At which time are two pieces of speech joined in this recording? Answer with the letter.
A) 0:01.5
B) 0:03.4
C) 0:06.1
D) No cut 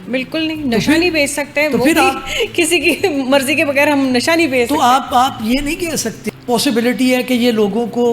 C